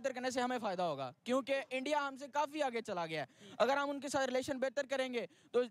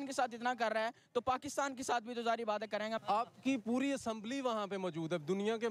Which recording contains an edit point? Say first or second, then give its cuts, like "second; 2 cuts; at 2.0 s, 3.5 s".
second; 1 cut; at 3.0 s